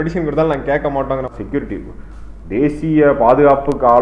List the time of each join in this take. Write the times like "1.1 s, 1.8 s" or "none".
1.3 s